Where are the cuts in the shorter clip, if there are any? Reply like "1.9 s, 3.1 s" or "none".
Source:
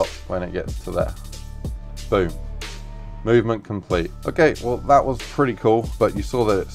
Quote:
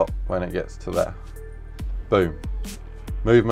none